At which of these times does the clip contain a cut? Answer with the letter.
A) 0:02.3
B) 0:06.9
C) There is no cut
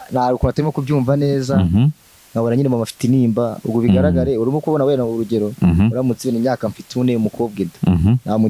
C